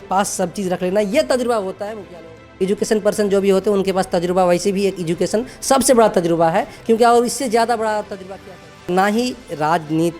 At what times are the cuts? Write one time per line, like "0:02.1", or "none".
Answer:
0:02.4
0:08.9